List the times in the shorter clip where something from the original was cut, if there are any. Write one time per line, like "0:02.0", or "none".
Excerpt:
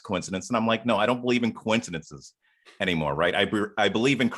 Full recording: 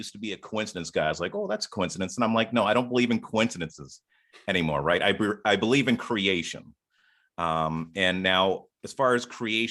none